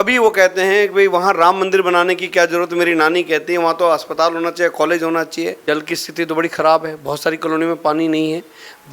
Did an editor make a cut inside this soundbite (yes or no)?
yes